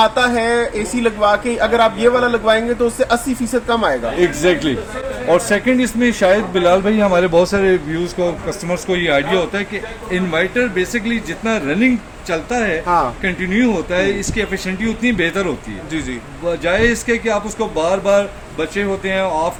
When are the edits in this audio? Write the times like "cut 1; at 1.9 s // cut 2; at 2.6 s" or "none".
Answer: none